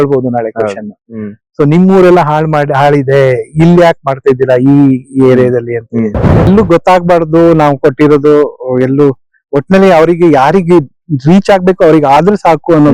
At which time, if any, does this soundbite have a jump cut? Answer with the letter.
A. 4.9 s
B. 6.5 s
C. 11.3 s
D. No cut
B